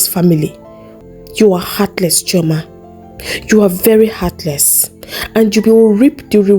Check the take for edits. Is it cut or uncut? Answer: cut